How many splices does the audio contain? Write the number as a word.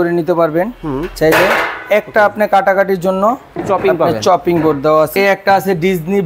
one